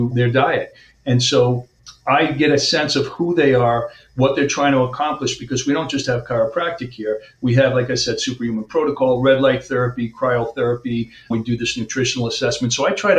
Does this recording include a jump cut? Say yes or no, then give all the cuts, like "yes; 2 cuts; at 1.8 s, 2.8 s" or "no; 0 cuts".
no; 0 cuts